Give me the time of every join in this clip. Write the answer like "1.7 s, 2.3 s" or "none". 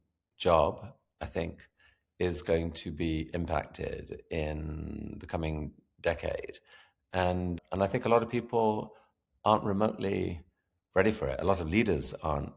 7.5 s